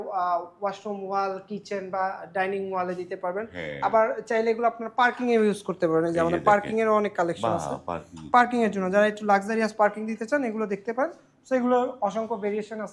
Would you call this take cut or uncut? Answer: uncut